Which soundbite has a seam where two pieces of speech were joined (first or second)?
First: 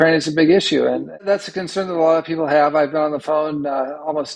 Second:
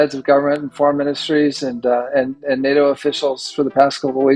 first